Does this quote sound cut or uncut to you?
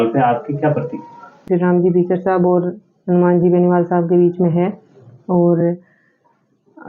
cut